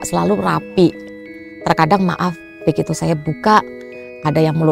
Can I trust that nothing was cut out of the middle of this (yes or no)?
yes